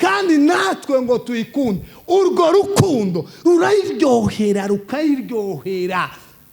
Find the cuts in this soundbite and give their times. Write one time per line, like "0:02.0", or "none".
none

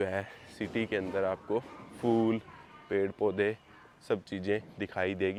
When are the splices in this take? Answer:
none

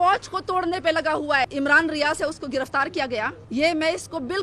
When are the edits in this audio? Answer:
0:01.5
0:03.4

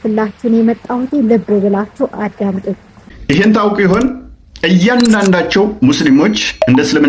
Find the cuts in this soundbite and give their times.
0:03.1

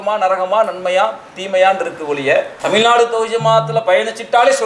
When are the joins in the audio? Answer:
0:02.5

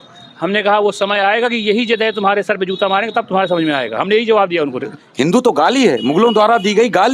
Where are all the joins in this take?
0:04.9

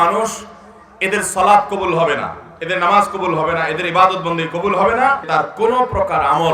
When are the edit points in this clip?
0:05.2

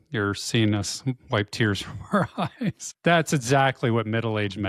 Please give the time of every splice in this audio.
0:02.9

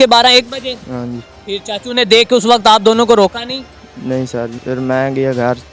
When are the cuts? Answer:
0:01.3
0:04.6

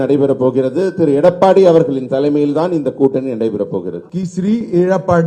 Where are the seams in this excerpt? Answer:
0:04.0

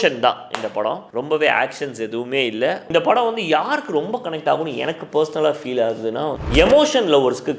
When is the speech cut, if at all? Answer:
0:01.1
0:02.9
0:06.4

